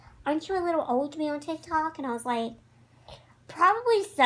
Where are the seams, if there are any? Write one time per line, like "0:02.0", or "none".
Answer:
none